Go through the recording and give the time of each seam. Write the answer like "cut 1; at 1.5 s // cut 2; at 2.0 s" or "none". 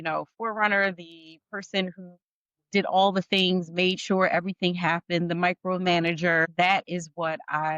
cut 1; at 6.5 s